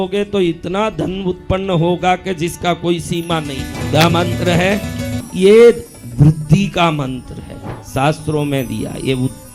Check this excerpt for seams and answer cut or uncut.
cut